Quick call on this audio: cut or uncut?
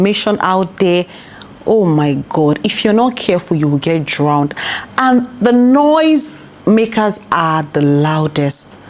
uncut